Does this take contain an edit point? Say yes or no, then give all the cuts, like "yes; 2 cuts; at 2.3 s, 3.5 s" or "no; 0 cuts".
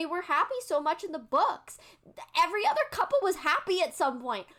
no; 0 cuts